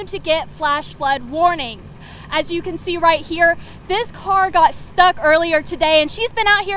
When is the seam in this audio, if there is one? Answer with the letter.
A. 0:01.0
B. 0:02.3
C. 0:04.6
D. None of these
D